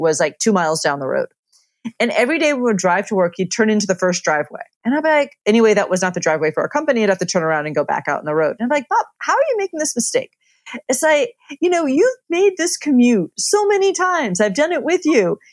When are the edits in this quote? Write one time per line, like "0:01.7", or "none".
none